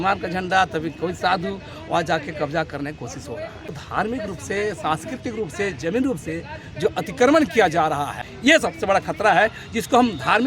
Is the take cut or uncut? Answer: cut